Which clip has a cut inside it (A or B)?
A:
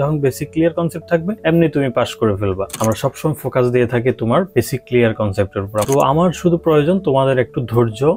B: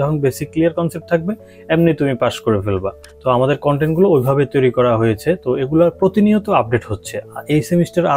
A